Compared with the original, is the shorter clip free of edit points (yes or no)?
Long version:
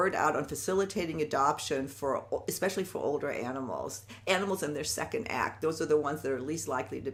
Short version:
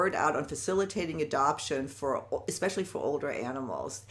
yes